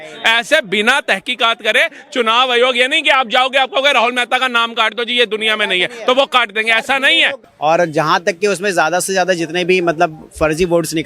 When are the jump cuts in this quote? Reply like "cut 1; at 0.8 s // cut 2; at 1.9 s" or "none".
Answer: cut 1; at 7.4 s